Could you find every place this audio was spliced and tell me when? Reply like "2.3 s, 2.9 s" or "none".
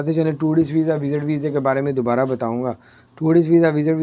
none